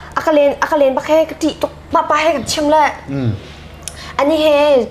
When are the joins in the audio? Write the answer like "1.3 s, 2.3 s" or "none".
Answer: 1.8 s